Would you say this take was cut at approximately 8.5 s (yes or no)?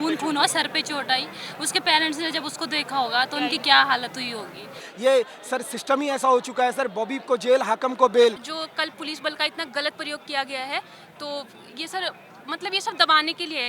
yes